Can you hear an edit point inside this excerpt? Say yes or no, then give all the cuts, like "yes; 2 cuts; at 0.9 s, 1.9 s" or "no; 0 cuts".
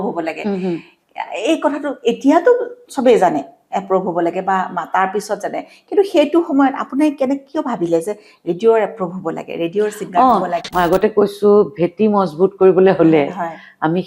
yes; 1 cut; at 10.7 s